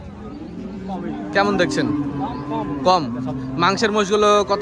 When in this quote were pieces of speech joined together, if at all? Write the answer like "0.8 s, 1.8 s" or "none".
none